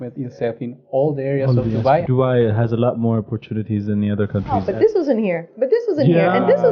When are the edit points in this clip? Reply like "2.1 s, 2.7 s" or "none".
2.0 s, 4.6 s